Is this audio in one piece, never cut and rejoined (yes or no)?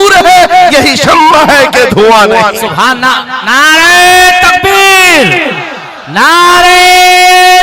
yes